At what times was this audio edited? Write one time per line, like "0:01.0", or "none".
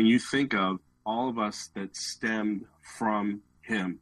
0:00.9